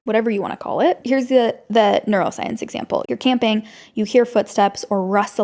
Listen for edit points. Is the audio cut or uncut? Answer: cut